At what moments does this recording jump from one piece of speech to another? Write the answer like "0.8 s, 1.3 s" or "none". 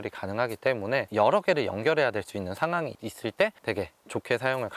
none

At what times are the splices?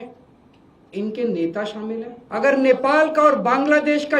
2.2 s

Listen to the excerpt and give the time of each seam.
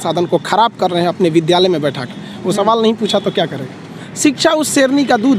4.0 s

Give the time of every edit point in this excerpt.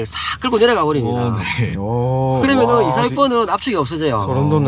none

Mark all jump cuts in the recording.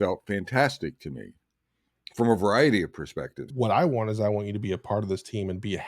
3.5 s

